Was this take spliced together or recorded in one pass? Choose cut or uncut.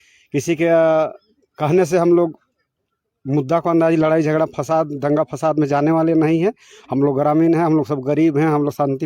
uncut